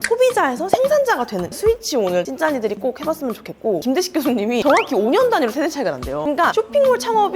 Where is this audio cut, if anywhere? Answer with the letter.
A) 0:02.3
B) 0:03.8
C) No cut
B